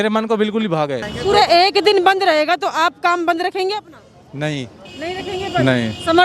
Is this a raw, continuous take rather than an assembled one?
no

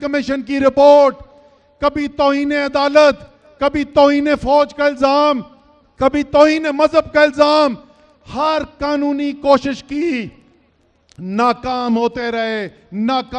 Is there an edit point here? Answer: no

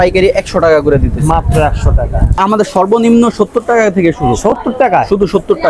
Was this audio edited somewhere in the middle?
yes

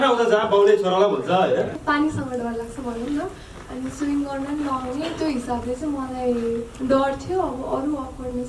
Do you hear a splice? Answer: yes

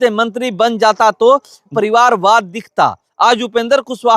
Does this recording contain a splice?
yes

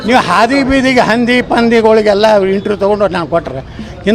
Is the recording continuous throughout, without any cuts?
yes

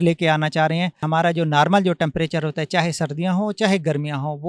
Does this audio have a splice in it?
yes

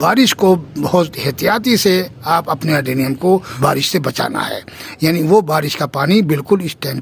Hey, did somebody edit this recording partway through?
yes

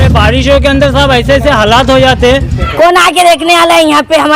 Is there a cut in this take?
yes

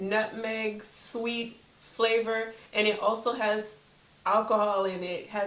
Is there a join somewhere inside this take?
no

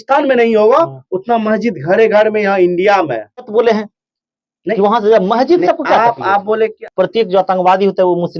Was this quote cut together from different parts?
yes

